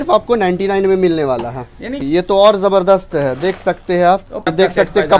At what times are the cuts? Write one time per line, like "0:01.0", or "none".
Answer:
0:02.0
0:04.4

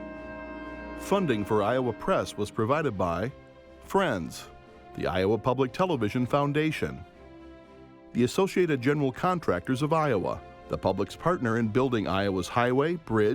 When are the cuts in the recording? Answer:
0:01.1

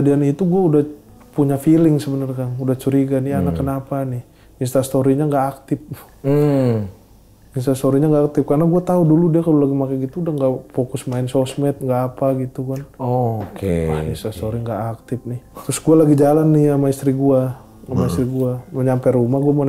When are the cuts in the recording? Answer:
none

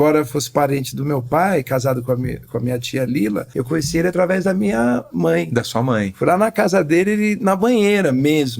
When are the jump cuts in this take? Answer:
0:03.5

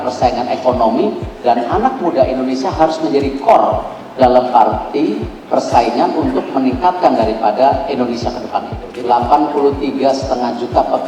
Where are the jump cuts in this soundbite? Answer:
0:08.8

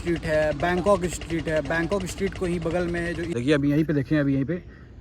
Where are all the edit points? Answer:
0:03.3

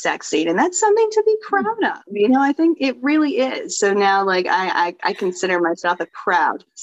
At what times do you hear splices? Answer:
none

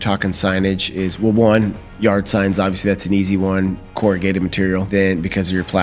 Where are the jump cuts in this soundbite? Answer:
0:04.9

